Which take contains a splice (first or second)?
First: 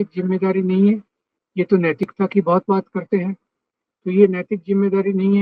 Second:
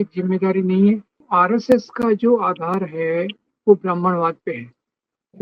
second